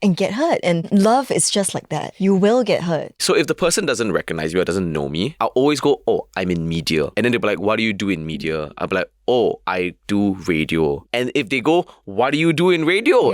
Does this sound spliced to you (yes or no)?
yes